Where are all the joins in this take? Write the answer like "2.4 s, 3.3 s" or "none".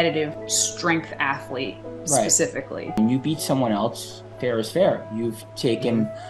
2.9 s